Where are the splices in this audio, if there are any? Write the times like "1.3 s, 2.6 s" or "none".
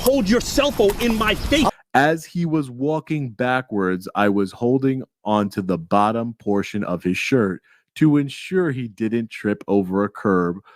1.7 s